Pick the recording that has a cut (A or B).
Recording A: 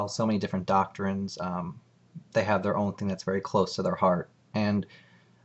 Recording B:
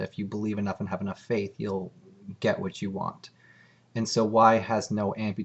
A